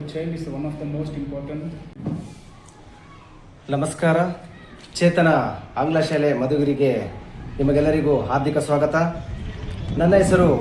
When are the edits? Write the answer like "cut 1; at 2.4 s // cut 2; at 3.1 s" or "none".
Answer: cut 1; at 1.9 s